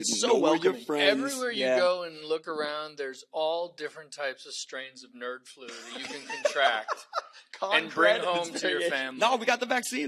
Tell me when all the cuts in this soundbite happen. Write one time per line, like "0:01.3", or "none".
none